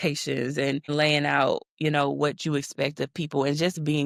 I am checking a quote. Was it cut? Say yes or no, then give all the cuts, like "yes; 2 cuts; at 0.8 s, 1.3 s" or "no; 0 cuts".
no; 0 cuts